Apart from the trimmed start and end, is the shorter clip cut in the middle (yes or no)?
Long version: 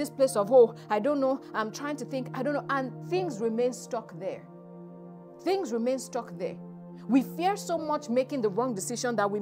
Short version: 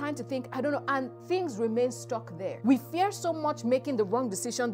yes